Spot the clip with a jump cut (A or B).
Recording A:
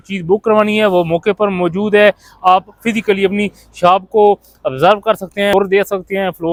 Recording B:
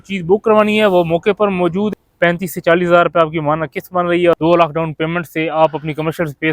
B